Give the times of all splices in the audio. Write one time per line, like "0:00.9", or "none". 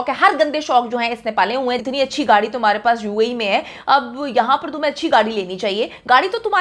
0:01.8